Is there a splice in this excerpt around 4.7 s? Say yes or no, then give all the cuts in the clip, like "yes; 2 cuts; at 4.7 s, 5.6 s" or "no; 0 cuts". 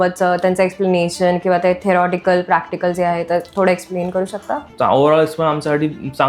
yes; 1 cut; at 4.7 s